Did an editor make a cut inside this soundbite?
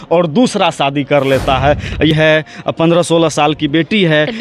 yes; 1 cut; at 2.1 s

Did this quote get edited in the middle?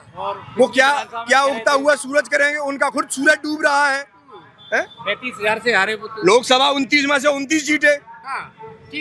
no; 0 cuts

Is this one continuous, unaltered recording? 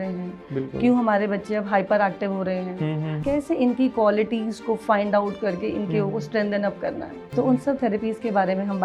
no; 2 cuts; at 3.1 s, 7.2 s

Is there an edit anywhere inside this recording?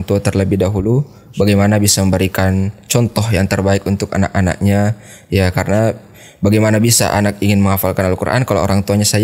no; 0 cuts

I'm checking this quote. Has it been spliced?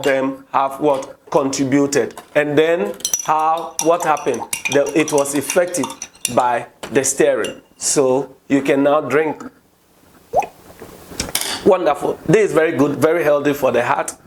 no; 0 cuts

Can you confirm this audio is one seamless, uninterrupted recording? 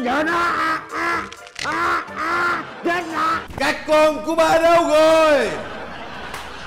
no; 1 cut; at 3.4 s

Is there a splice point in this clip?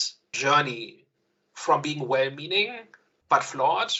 no; 0 cuts

